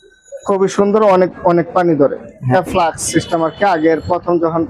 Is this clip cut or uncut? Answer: cut